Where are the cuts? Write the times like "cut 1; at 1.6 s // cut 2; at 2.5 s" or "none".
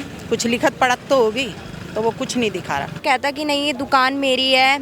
cut 1; at 3.0 s